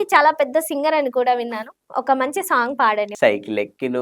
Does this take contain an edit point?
yes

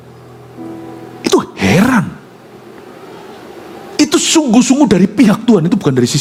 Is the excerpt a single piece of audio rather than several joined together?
yes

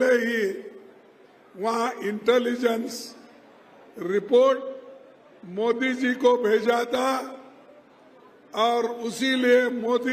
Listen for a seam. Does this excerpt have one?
no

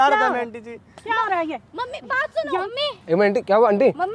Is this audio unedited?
no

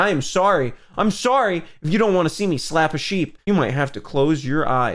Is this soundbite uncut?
no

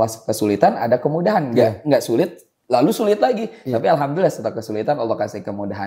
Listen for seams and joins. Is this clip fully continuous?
yes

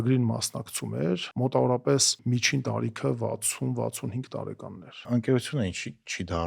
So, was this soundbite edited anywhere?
yes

